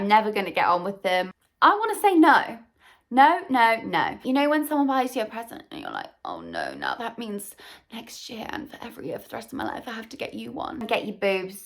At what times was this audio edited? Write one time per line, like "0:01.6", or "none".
0:01.4
0:04.2
0:10.8